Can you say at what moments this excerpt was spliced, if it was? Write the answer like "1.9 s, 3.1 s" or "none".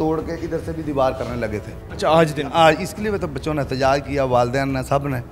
none